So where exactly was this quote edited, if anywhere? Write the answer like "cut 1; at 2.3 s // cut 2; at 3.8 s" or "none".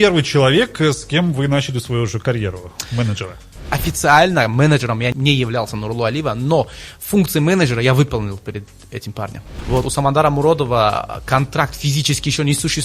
cut 1; at 3.6 s // cut 2; at 5.1 s // cut 3; at 9.5 s

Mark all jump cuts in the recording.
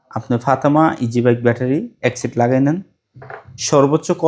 none

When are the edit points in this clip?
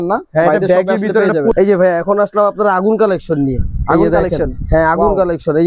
cut 1; at 1.5 s

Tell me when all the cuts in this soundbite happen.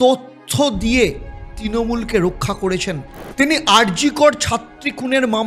cut 1; at 3.2 s

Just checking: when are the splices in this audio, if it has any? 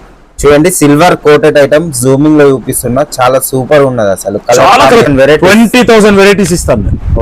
cut 1; at 5.1 s

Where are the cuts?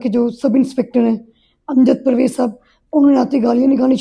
none

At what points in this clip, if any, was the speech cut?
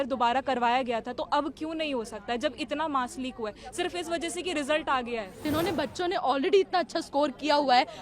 cut 1; at 5.4 s

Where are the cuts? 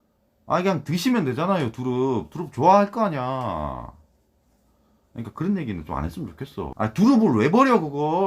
cut 1; at 6.7 s

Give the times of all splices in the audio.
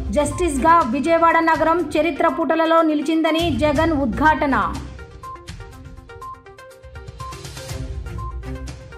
cut 1; at 4.9 s

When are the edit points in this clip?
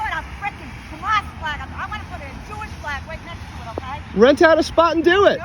cut 1; at 4.0 s

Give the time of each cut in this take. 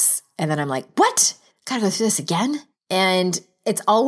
cut 1; at 2.7 s

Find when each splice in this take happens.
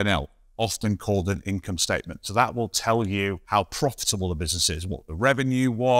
cut 1; at 3.4 s

